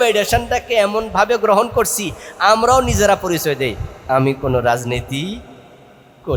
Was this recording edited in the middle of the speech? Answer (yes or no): no